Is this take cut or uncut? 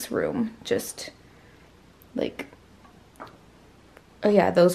uncut